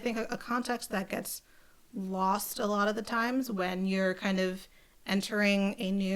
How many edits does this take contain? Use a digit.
0